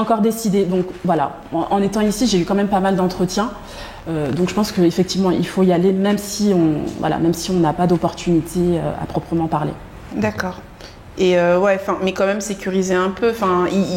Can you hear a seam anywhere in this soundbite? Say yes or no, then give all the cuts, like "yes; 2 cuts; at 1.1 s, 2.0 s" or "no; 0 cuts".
no; 0 cuts